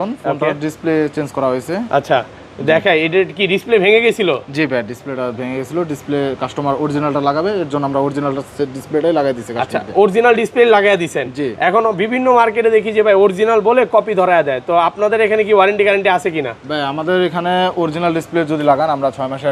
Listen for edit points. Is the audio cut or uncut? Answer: uncut